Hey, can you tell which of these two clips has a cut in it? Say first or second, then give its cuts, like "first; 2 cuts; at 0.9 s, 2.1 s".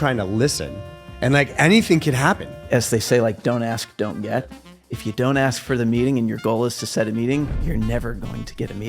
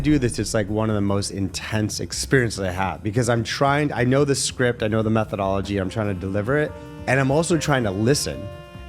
first; 2 cuts; at 2.6 s, 7.6 s